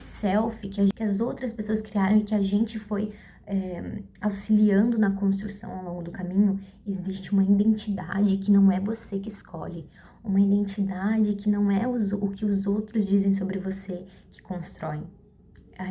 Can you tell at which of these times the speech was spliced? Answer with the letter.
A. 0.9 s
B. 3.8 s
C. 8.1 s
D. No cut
A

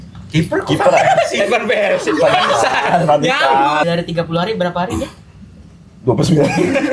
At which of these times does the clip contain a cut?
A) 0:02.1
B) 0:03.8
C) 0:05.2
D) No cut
B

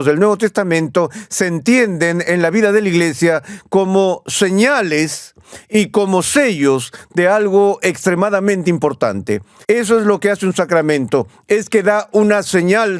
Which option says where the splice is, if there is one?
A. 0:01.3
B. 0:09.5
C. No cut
B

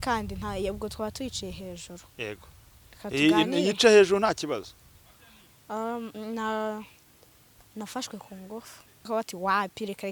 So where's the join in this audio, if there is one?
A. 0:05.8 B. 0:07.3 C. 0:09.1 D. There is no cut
C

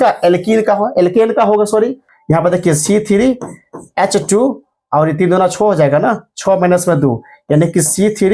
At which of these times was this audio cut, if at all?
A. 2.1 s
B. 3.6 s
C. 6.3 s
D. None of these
A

